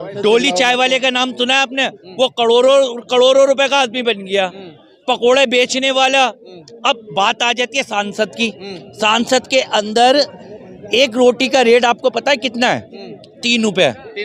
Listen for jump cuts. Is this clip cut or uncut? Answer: uncut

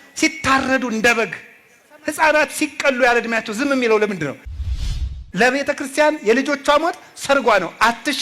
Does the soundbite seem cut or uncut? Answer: cut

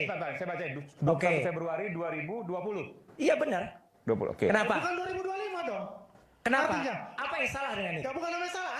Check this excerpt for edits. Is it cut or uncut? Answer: uncut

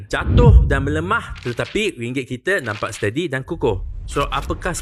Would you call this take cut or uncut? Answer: uncut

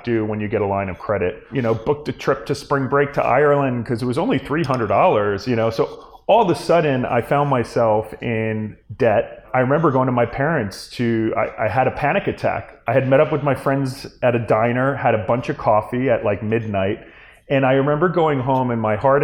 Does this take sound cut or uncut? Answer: cut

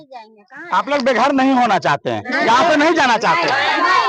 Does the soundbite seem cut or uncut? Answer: uncut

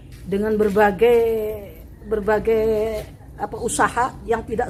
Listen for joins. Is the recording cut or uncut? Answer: uncut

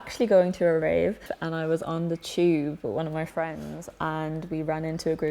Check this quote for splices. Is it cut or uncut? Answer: uncut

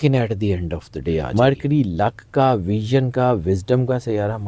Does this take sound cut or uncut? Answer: cut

